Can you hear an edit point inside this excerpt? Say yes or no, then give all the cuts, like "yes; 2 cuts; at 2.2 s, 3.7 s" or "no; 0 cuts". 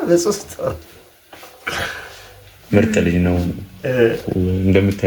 no; 0 cuts